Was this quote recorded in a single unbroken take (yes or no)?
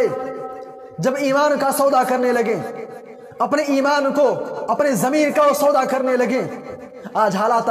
yes